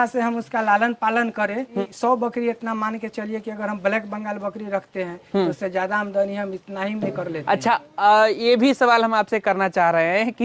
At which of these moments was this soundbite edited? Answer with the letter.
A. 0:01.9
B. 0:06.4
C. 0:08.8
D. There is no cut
A